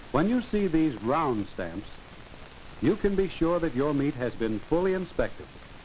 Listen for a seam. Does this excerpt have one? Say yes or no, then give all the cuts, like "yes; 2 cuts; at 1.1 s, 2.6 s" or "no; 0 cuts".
yes; 1 cut; at 1.8 s